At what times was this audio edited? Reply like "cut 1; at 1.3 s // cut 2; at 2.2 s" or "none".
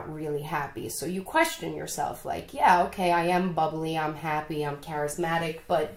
none